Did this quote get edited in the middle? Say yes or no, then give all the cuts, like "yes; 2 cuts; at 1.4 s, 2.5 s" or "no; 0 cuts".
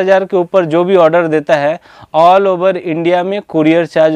no; 0 cuts